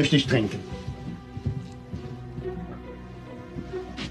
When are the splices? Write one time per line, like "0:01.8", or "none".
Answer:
0:02.0